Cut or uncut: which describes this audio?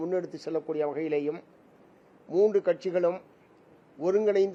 uncut